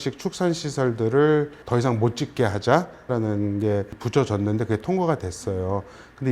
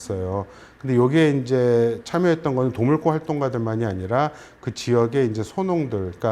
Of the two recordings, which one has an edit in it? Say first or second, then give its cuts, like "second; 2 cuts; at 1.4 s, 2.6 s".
first; 3 cuts; at 1.6 s, 3.1 s, 4.0 s